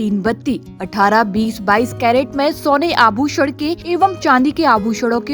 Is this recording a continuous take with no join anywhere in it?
no; 1 cut; at 3.8 s

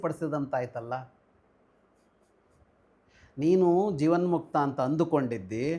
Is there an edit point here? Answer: no; 0 cuts

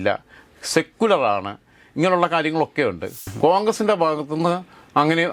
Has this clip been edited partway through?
yes; 1 cut; at 3.1 s

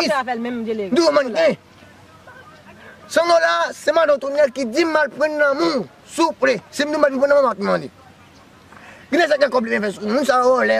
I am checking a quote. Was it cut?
no; 0 cuts

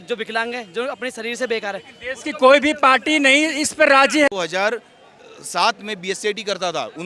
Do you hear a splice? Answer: yes; 1 cut; at 4.3 s

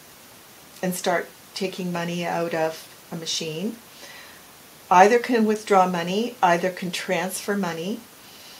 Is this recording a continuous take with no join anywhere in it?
yes; 0 cuts

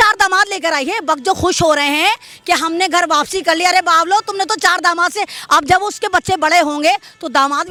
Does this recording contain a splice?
no; 0 cuts

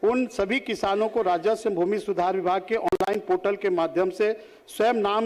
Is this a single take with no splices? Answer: yes; 0 cuts

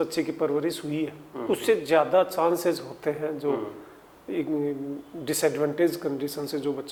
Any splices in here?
no; 0 cuts

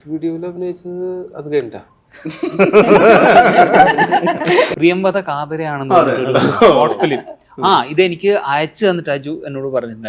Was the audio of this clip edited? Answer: yes; 1 cut; at 4.7 s

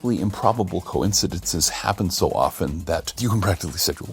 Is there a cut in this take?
yes; 1 cut; at 3.1 s

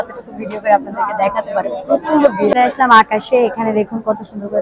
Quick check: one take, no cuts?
no; 1 cut; at 2.3 s

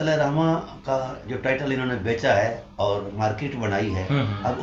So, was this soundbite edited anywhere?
no; 0 cuts

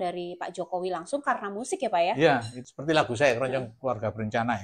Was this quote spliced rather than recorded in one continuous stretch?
yes; 1 cut; at 2.6 s

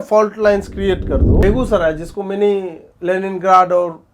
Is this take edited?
yes; 1 cut; at 1.4 s

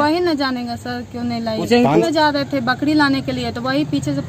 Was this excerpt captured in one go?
no; 1 cut; at 2.0 s

